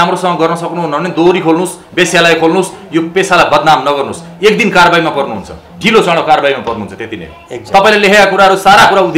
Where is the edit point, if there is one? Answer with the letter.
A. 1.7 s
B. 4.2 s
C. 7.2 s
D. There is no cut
D